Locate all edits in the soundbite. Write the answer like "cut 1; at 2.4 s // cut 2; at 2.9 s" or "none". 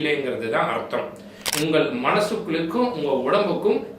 cut 1; at 1.4 s